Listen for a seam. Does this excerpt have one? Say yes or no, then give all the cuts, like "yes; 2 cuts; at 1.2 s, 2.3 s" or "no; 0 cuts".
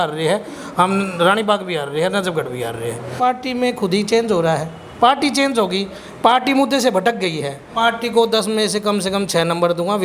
yes; 2 cuts; at 3.1 s, 7.7 s